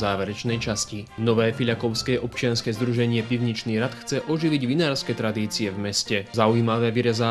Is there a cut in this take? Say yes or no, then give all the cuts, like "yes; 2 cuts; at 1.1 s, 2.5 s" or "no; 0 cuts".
yes; 2 cuts; at 1.1 s, 6.3 s